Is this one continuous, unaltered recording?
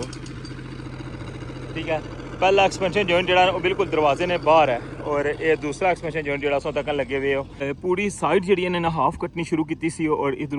no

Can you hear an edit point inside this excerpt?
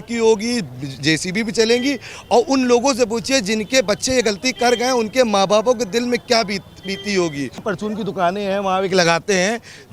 yes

